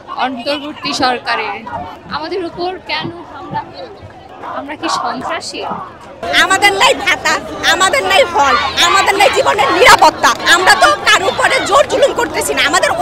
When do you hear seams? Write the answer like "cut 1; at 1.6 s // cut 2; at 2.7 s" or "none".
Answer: none